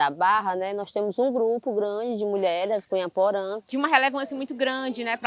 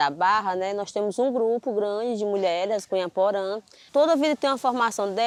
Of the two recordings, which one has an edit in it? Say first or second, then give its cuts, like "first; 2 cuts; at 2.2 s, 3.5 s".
first; 1 cut; at 3.6 s